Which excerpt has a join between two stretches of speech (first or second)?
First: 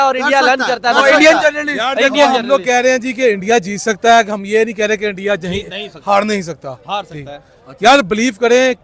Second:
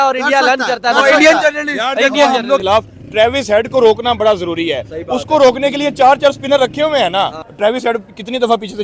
second